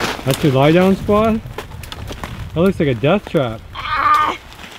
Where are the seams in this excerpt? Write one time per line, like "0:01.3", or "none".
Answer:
none

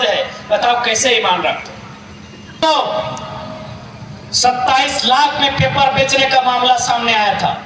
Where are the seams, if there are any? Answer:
0:02.6

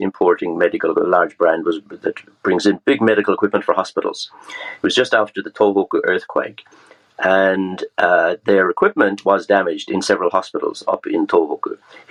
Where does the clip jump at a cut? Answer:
none

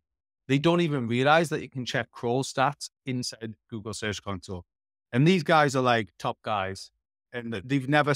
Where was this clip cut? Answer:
none

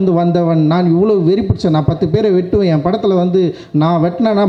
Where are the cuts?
none

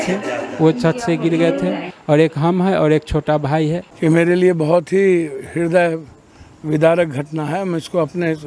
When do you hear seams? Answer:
0:03.9

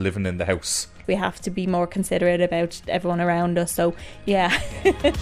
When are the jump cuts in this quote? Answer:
0:01.0
0:04.1

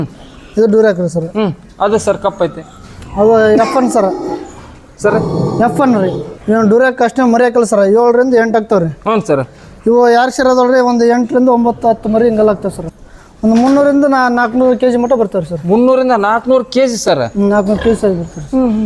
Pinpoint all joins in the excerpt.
0:06.2
0:12.8

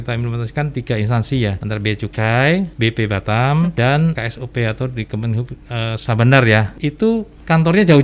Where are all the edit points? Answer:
0:01.6
0:02.7
0:04.0
0:06.8

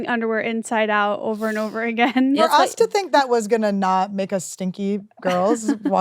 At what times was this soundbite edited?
0:02.4

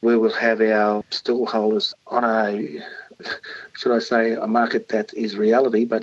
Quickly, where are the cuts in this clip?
0:01.2

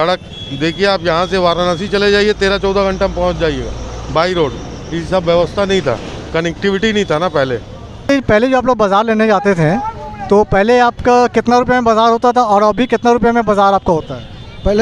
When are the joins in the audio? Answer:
0:08.1

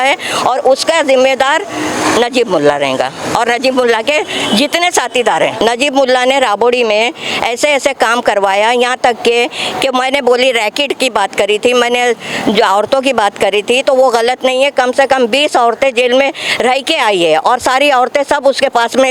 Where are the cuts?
0:05.5

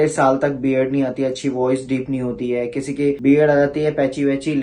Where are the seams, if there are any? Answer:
none

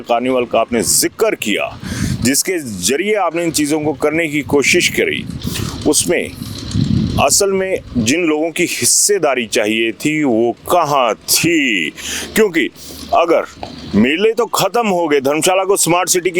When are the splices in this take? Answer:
none

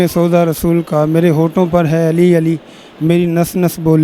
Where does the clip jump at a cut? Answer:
none

